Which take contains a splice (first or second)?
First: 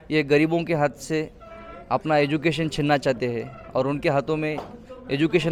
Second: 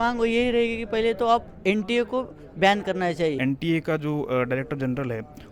second